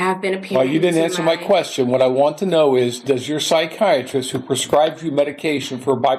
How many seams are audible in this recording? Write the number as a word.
zero